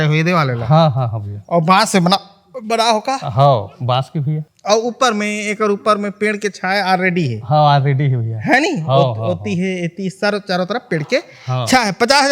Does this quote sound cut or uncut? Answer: uncut